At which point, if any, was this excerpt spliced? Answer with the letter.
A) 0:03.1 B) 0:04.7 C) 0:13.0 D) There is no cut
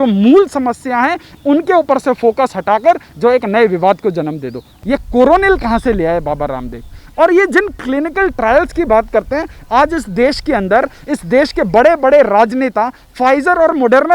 B